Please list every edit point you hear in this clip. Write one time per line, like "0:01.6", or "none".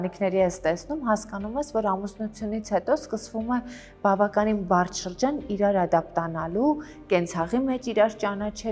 none